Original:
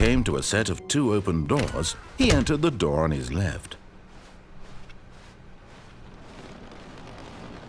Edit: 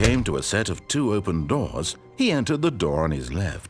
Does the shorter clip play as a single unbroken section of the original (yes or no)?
yes